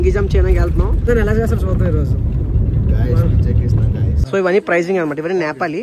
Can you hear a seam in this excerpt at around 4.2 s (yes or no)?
yes